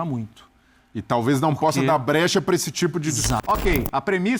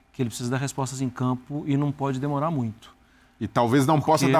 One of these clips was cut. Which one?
first; 1 cut; at 3.4 s

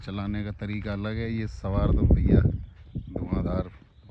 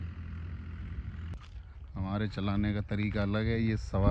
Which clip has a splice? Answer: second; 1 cut; at 1.3 s

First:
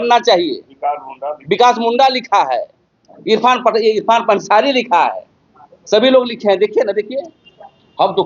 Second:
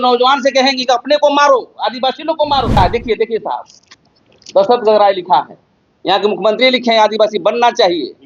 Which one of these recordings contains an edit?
second; 1 cut; at 2.8 s

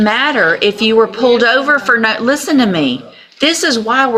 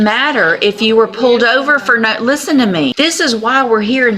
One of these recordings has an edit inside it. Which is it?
second; 1 cut; at 2.9 s

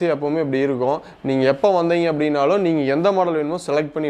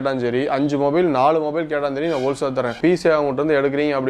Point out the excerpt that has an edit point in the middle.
second; 1 cut; at 2.8 s

